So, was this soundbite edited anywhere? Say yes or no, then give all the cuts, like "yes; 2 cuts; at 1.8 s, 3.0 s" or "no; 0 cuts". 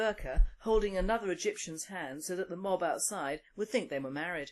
yes; 1 cut; at 3.3 s